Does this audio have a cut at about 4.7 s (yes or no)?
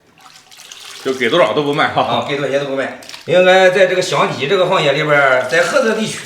no